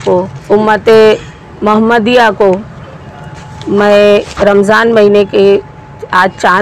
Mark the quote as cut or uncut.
uncut